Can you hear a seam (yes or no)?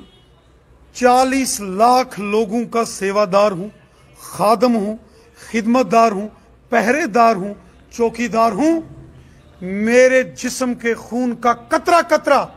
no